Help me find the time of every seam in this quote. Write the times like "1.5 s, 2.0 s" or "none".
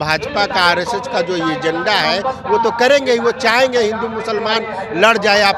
none